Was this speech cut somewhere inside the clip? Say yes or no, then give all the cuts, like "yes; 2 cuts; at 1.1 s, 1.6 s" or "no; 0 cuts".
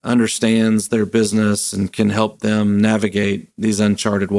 no; 0 cuts